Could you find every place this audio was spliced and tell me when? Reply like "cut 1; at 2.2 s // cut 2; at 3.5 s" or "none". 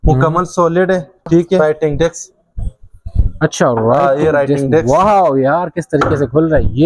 cut 1; at 1.6 s